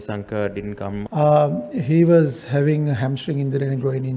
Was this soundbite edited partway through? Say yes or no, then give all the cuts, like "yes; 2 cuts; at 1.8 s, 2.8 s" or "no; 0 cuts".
yes; 1 cut; at 1.1 s